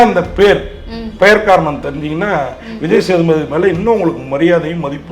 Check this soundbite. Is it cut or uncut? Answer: uncut